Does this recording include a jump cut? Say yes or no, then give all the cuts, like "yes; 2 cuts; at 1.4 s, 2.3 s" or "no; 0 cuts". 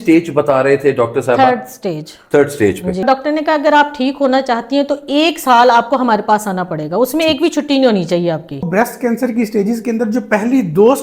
yes; 2 cuts; at 3.0 s, 8.7 s